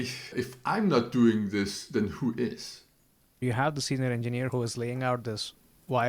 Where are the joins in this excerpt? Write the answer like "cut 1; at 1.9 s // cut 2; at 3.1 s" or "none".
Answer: cut 1; at 3.4 s // cut 2; at 4.5 s